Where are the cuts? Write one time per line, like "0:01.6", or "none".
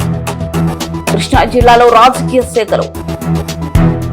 0:00.9